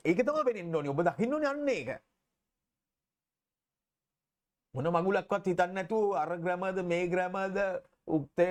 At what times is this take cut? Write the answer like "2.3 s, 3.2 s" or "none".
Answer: none